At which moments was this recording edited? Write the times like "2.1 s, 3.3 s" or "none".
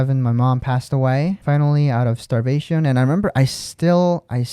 1.4 s